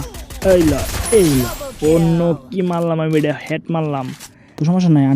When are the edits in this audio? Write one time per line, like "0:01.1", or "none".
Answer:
0:03.8